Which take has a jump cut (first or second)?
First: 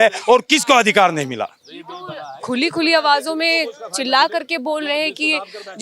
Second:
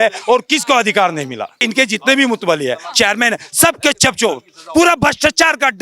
second